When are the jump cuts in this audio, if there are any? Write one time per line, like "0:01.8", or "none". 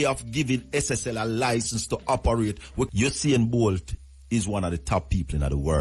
0:02.9